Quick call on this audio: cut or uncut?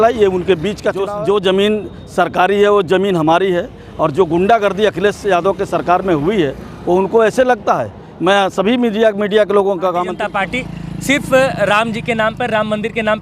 cut